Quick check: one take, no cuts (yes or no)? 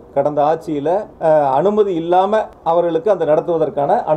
no